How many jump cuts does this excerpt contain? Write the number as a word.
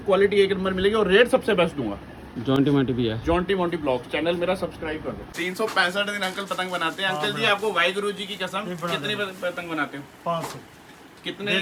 zero